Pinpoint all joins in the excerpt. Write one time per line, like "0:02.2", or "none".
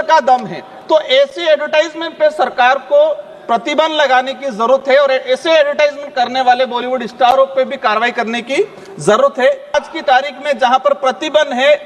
0:09.7